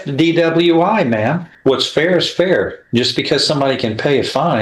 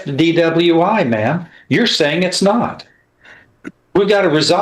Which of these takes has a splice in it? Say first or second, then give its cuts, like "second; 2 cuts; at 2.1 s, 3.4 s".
first; 1 cut; at 1.5 s